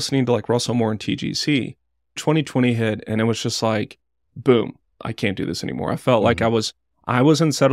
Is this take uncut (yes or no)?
no